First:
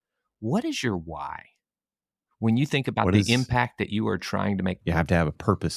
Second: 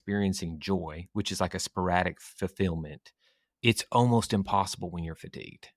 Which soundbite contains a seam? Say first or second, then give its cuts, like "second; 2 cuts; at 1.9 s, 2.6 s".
first; 1 cut; at 4.8 s